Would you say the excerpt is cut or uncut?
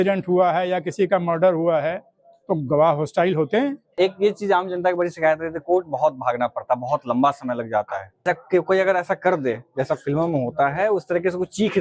cut